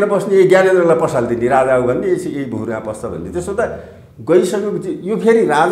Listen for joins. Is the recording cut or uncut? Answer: uncut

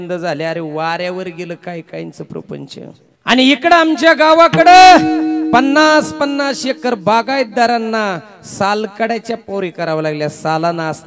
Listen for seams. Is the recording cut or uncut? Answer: cut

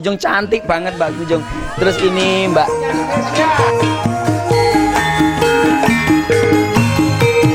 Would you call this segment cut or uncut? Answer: uncut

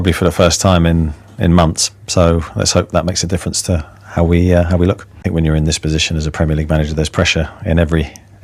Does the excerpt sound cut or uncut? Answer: uncut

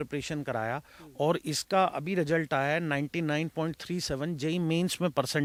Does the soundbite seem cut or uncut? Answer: uncut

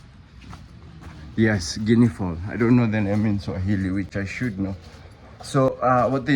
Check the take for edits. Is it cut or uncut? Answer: uncut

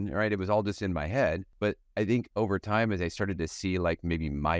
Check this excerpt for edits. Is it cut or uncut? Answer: cut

